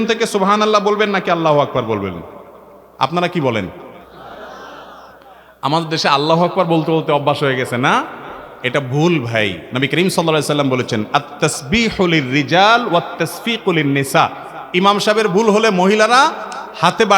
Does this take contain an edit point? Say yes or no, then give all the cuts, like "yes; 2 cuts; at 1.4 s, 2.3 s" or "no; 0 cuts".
no; 0 cuts